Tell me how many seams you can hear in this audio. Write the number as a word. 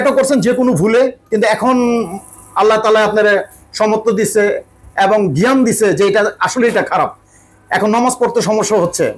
zero